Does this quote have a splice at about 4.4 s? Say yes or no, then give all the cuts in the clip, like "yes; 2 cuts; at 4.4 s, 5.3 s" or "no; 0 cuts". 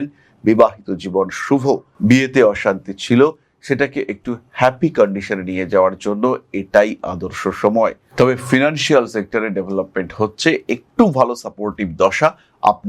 no; 1 cut; at 8.0 s